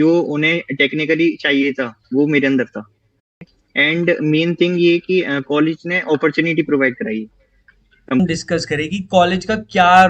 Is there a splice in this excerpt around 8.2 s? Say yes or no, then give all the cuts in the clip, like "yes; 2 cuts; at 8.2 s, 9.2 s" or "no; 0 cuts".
yes; 2 cuts; at 3.6 s, 8.2 s